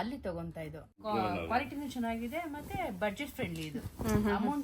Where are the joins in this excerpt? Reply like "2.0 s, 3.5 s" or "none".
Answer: 1.0 s